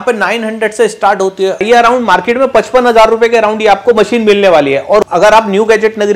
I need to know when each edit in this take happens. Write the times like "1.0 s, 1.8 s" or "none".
1.6 s, 5.1 s